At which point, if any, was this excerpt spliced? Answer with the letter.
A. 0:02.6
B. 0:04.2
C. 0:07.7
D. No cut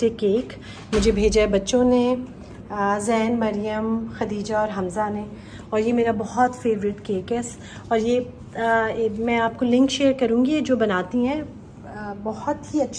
D